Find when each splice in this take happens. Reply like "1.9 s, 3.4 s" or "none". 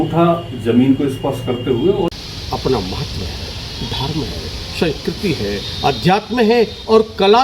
2.2 s